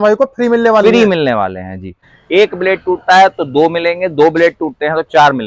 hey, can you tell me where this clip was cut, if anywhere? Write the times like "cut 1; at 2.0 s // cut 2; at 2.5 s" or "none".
cut 1; at 2.0 s